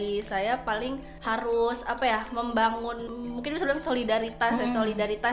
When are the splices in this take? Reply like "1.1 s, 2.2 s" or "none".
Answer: 1.1 s, 3.1 s